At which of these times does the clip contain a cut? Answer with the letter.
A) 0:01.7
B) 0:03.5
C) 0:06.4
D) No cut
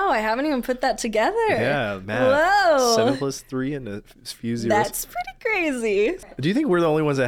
C